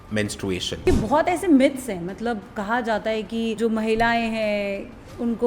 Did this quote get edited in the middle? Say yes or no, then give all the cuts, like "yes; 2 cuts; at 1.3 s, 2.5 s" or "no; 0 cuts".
yes; 2 cuts; at 0.8 s, 3.6 s